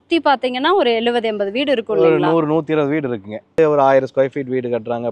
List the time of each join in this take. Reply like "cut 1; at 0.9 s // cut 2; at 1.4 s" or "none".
cut 1; at 3.5 s